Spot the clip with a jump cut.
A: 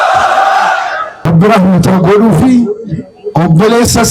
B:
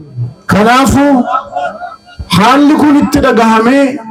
A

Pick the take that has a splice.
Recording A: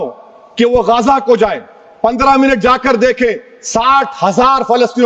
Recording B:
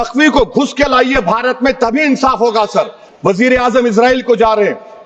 B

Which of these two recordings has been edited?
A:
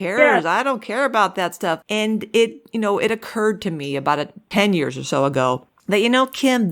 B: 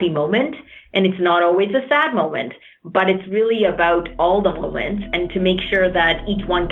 A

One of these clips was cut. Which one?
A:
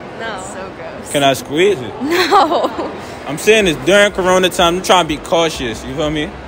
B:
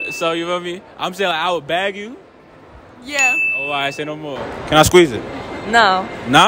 B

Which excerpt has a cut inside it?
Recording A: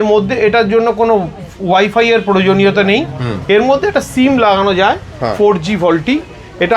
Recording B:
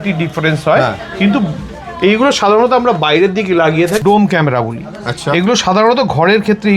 B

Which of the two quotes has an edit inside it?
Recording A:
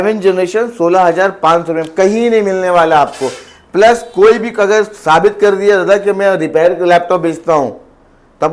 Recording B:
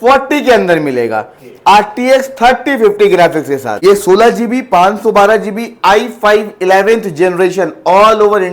B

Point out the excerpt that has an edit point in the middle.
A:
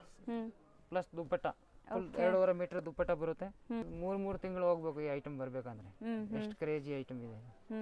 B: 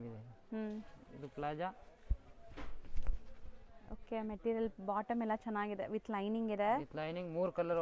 A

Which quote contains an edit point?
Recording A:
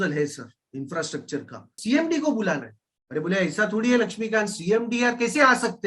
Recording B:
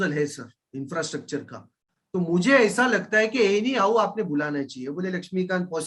A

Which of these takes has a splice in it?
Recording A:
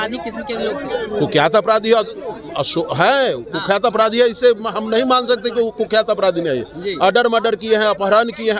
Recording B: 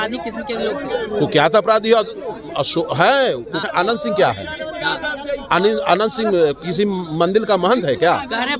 B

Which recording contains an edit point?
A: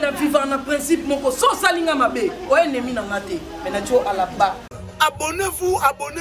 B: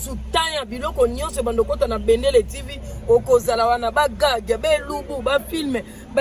A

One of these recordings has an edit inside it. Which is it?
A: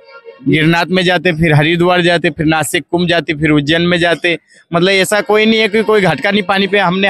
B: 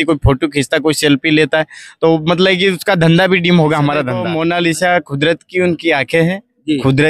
B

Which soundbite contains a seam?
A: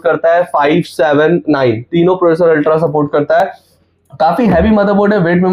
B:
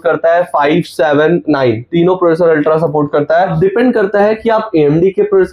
B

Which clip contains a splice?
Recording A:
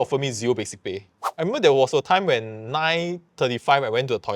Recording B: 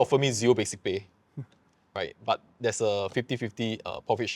A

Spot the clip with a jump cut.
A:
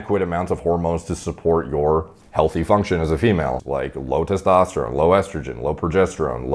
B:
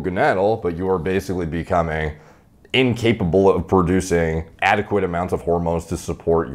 A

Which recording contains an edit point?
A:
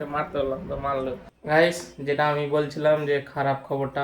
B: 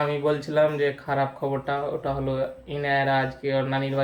A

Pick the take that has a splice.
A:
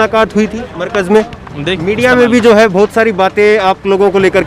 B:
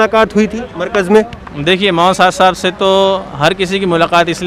A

